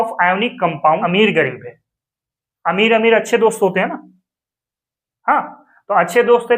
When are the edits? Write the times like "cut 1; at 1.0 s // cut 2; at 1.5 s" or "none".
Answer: cut 1; at 1.0 s